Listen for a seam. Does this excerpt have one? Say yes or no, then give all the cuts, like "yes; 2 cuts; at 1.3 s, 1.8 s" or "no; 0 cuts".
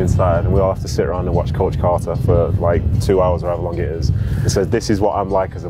no; 0 cuts